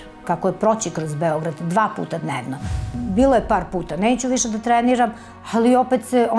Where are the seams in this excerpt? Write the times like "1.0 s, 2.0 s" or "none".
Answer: 2.8 s